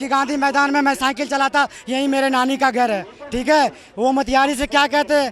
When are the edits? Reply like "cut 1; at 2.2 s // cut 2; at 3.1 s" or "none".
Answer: none